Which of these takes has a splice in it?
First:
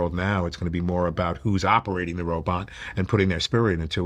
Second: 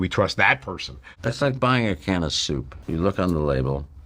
second; 2 cuts; at 1.0 s, 2.7 s

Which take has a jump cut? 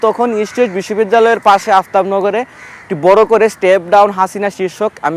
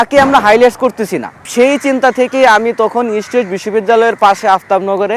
second; 1 cut; at 1.4 s

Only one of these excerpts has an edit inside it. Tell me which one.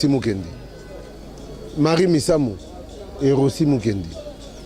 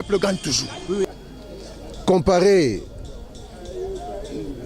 second; 1 cut; at 1.0 s

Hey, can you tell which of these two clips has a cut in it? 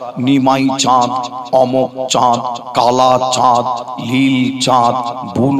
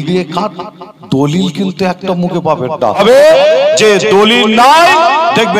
second; 1 cut; at 3.0 s

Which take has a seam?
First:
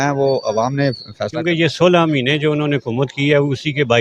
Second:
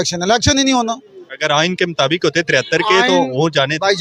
first; 1 cut; at 1.4 s

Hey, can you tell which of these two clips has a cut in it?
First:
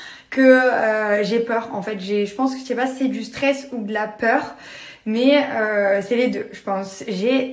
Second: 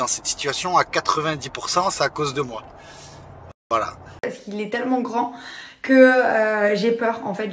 second; 1 cut; at 4.1 s

